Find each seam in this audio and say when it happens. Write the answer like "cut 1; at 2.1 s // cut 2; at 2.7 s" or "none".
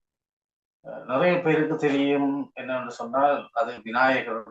none